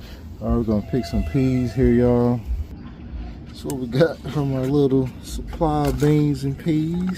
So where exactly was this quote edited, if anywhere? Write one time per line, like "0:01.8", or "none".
0:02.7